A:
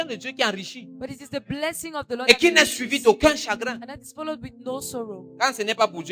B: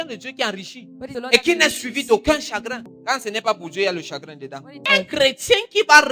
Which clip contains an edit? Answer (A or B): B